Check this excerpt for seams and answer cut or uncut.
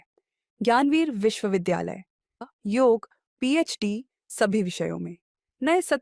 cut